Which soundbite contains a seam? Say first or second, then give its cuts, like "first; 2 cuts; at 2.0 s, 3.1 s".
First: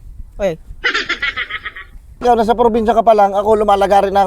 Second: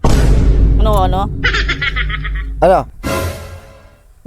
first; 1 cut; at 2.1 s